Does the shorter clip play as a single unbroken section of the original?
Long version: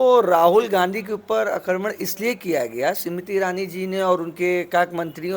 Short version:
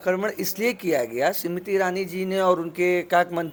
yes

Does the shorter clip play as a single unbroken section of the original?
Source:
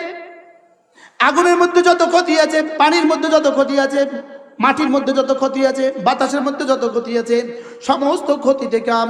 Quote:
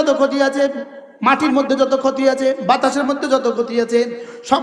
yes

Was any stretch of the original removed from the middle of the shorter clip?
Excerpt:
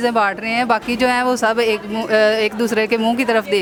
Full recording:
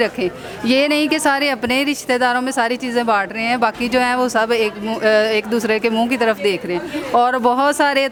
no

